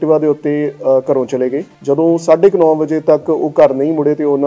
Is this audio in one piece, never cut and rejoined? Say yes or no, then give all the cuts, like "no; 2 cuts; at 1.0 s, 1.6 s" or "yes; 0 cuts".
no; 1 cut; at 1.7 s